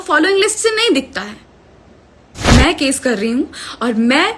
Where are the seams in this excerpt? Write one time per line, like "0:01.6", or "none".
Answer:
0:02.5